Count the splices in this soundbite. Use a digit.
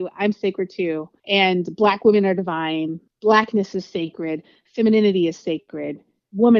2